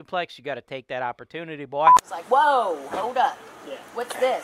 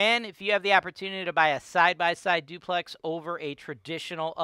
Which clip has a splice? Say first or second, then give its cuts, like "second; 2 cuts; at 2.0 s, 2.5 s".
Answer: first; 1 cut; at 1.8 s